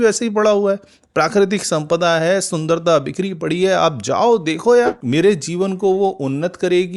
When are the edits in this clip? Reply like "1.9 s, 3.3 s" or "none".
5.0 s